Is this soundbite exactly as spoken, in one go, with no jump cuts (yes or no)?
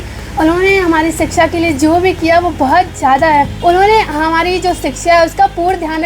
no